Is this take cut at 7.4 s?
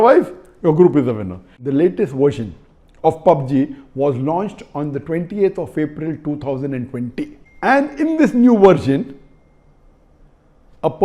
yes; 2 cuts; at 1.6 s, 7.4 s

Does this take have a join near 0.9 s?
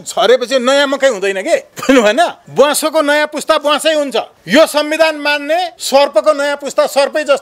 no; 1 cut; at 2.4 s

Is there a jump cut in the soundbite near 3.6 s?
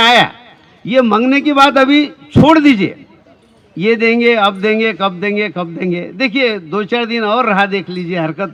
no; 0 cuts

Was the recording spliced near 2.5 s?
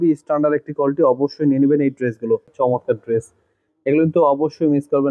yes; 1 cut; at 2.5 s

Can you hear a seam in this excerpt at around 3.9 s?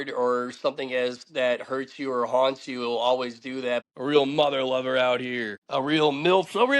yes; 2 cuts; at 3.9 s, 5.5 s

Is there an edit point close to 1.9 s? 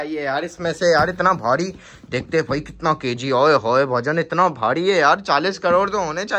no; 0 cuts

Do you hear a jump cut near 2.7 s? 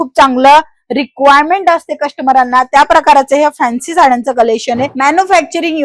no; 1 cut; at 4.9 s

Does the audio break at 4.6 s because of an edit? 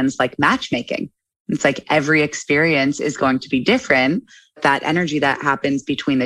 yes; 1 cut; at 4.6 s

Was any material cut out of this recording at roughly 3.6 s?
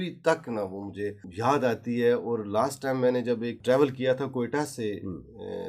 yes; 2 cuts; at 1.2 s, 3.6 s

